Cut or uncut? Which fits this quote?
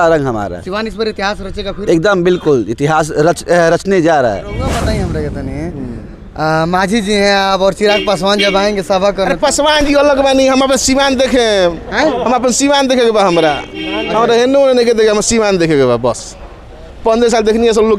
cut